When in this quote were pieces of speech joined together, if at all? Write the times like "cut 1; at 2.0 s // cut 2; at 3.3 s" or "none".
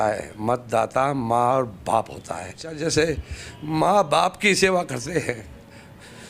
cut 1; at 2.7 s

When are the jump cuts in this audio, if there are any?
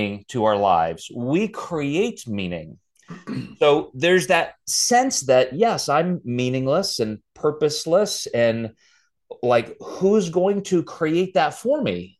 none

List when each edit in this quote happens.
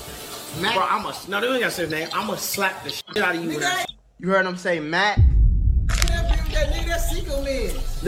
none

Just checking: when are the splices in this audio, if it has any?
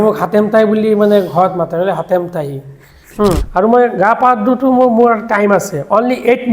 cut 1; at 3.4 s

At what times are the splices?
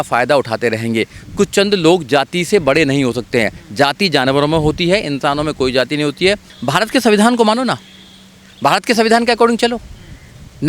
cut 1; at 6.5 s

